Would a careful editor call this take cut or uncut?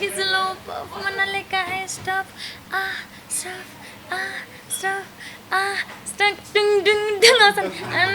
uncut